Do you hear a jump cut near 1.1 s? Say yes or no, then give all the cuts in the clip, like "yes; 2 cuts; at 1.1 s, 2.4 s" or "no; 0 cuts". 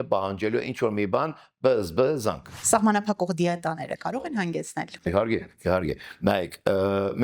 no; 1 cut; at 2.5 s